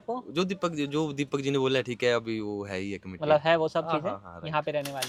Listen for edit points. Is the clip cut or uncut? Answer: uncut